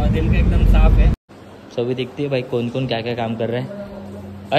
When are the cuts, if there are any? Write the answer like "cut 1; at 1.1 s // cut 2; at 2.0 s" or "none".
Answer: cut 1; at 1.1 s